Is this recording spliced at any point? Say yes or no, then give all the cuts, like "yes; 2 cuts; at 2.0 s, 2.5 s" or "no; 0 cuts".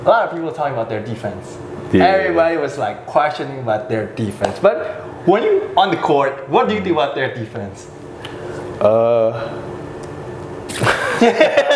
no; 0 cuts